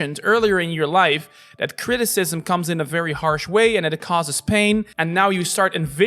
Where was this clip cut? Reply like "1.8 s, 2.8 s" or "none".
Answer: 4.9 s